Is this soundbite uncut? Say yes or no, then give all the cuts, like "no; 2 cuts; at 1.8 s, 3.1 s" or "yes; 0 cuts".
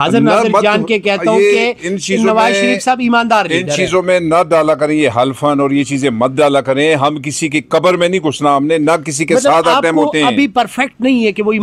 yes; 0 cuts